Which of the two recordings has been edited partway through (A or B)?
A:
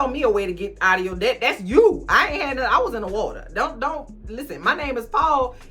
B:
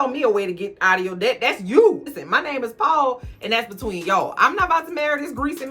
B